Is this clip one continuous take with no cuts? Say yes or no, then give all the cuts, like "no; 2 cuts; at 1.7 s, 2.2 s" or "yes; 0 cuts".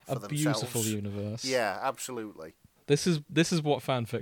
yes; 0 cuts